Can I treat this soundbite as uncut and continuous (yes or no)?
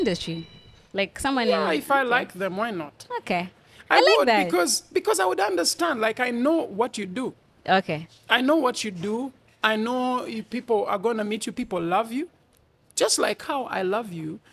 yes